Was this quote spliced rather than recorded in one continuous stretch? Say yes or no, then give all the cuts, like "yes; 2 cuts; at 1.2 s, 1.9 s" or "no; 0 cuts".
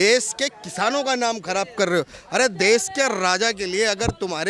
no; 0 cuts